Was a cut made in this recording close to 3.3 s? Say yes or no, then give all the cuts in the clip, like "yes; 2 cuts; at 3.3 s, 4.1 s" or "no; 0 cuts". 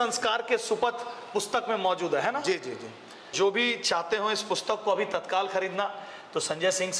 yes; 1 cut; at 3.3 s